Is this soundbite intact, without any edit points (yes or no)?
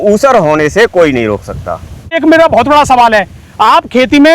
no